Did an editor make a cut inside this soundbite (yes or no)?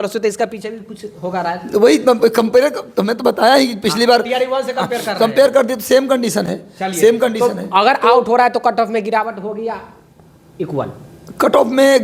no